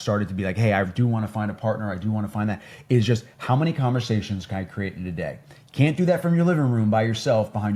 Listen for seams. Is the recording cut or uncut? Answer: uncut